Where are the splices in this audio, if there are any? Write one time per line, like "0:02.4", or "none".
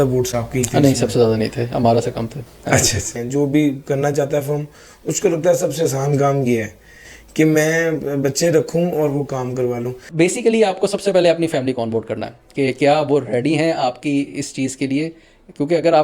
0:03.2
0:10.0